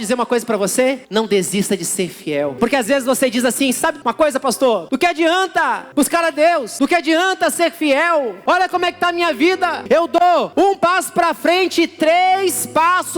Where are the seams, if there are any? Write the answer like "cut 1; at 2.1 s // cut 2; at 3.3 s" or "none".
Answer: cut 1; at 1.0 s // cut 2; at 2.5 s // cut 3; at 4.0 s // cut 4; at 4.8 s // cut 5; at 5.8 s // cut 6; at 6.7 s // cut 7; at 8.4 s // cut 8; at 9.8 s // cut 9; at 10.5 s